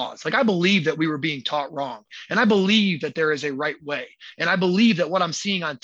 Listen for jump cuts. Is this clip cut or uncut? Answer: uncut